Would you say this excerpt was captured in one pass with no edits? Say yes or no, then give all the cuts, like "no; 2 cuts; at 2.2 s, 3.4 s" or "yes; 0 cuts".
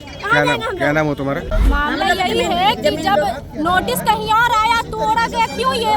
no; 1 cut; at 1.5 s